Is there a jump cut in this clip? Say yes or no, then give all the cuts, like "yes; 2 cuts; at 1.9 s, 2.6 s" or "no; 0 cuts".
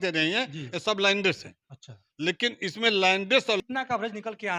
yes; 1 cut; at 3.6 s